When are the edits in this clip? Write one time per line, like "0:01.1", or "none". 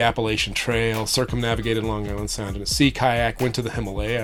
none

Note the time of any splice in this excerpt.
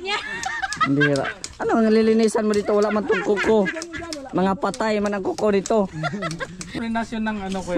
0:06.7

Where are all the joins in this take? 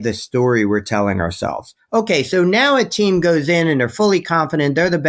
none

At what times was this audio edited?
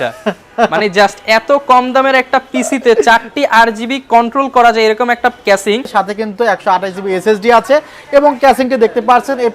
0:05.9

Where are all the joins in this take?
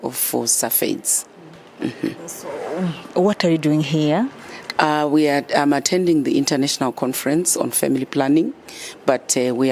none

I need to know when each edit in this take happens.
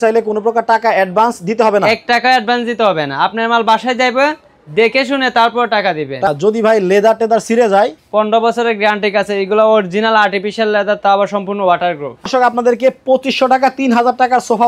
0:06.3
0:12.3

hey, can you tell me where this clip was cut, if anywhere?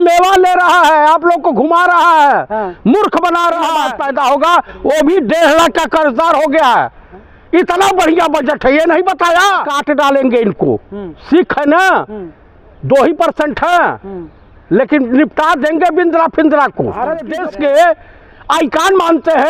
0:03.9
0:09.7
0:17.4

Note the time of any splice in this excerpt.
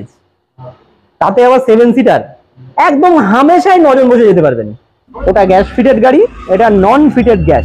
0:05.1

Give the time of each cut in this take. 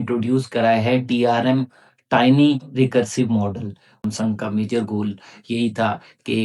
0:03.9

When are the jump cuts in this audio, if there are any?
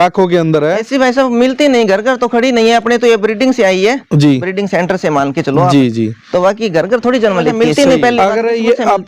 0:07.6

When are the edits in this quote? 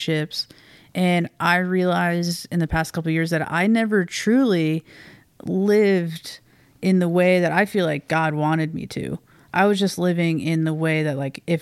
none

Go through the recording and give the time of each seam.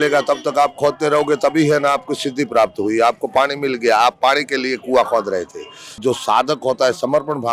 0:06.0

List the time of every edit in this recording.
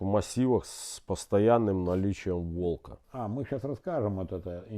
0:02.9

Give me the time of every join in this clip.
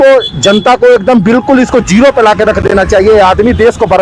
none

